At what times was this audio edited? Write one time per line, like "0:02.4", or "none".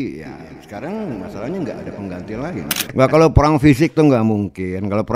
0:02.8